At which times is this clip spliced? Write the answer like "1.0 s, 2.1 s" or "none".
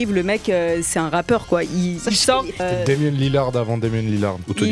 2.6 s